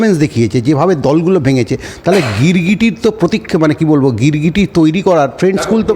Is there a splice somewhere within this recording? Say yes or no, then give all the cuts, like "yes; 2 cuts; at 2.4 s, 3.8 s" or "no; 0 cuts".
no; 0 cuts